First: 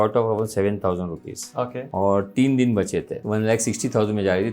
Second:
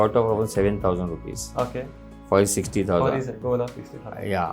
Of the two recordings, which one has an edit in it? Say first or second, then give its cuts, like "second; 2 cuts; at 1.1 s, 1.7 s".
first; 2 cuts; at 1.8 s, 3.1 s